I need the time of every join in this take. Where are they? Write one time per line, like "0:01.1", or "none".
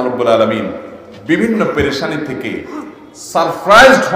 none